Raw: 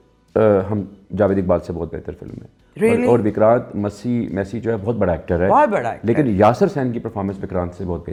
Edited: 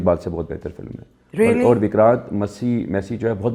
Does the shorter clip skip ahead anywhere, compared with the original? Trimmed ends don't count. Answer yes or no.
no